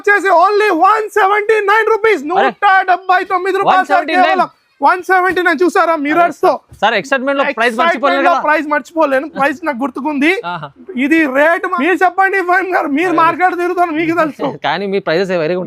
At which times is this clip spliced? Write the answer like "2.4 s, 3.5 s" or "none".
11.7 s